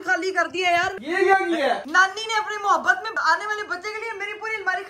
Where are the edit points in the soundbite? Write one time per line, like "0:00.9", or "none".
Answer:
0:01.0
0:01.9
0:03.1